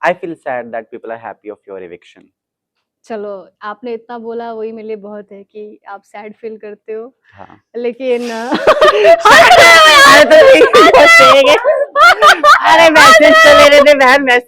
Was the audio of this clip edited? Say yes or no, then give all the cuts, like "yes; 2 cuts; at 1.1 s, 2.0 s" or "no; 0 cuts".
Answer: no; 0 cuts